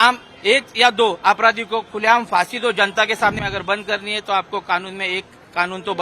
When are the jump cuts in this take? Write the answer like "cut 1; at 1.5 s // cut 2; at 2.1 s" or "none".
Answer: cut 1; at 3.4 s